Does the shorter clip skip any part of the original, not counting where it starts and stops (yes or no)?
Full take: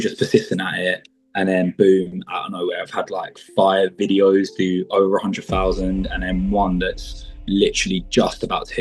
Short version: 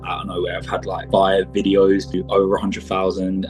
yes